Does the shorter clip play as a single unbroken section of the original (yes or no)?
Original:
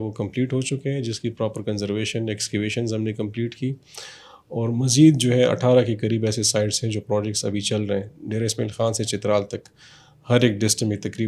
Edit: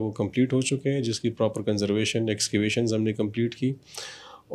yes